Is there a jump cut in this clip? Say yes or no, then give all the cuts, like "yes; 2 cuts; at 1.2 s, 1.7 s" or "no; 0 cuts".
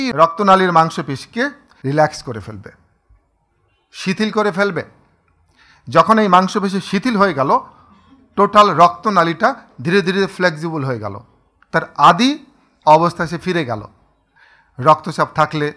yes; 1 cut; at 1.7 s